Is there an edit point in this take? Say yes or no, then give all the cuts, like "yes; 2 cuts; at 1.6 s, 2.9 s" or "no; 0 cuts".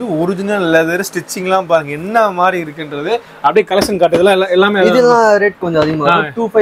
no; 0 cuts